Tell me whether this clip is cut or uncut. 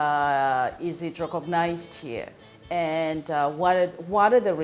uncut